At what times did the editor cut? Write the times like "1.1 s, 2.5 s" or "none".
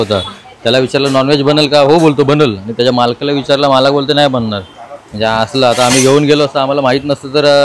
none